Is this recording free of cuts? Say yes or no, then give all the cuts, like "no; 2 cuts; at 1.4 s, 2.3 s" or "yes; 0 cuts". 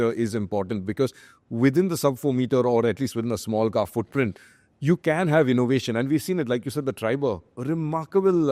yes; 0 cuts